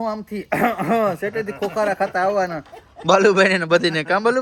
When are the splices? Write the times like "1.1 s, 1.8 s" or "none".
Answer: none